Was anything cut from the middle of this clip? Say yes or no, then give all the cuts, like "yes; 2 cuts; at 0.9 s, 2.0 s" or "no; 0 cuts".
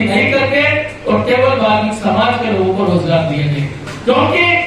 no; 0 cuts